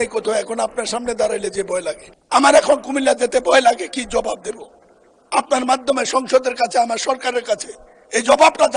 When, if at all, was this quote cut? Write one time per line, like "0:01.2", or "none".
0:02.1